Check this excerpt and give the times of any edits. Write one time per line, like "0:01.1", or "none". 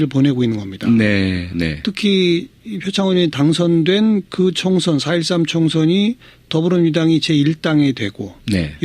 0:06.8